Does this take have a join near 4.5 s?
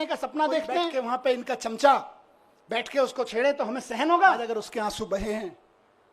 yes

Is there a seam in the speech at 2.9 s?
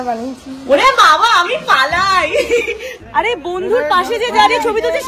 yes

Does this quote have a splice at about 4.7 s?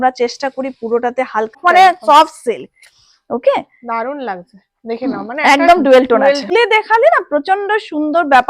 no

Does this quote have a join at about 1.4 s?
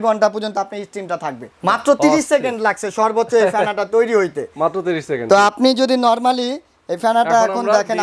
yes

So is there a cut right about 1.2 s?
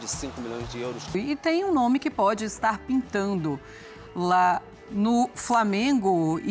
yes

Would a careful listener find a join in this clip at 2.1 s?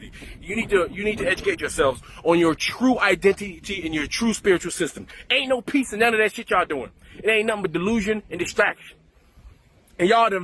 no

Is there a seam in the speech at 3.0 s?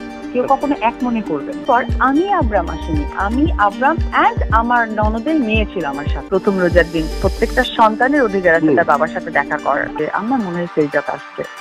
no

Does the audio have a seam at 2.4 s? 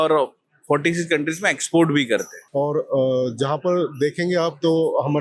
yes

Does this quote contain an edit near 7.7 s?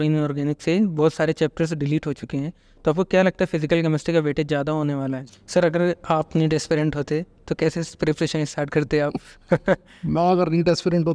no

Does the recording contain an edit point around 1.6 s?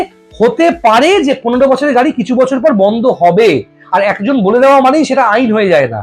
no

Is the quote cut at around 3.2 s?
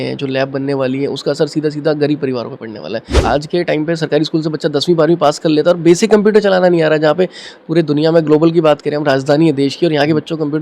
yes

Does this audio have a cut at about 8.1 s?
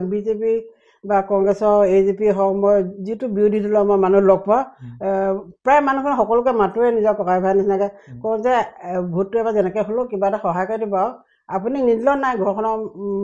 no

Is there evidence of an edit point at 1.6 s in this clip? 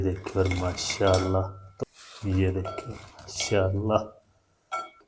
yes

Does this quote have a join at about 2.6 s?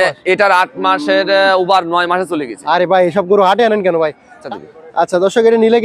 no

